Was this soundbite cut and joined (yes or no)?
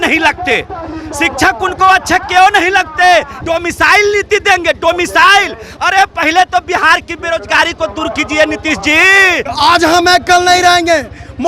yes